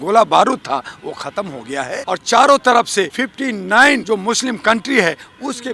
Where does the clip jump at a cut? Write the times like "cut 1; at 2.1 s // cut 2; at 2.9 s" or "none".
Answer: cut 1; at 2.0 s // cut 2; at 3.1 s // cut 3; at 4.0 s